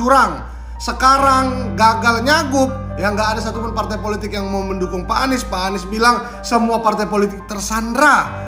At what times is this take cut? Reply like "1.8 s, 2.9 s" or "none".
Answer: none